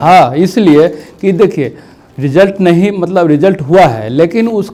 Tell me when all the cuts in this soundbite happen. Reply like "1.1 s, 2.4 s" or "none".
none